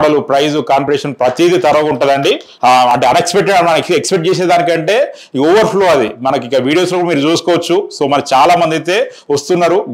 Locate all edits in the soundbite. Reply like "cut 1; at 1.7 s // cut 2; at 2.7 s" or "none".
cut 1; at 2.5 s